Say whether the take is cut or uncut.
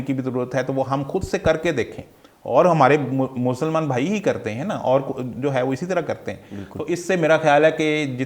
uncut